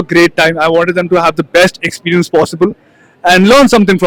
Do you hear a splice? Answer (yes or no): no